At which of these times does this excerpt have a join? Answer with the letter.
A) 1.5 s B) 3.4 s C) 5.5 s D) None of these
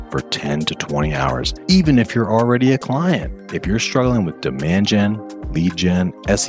A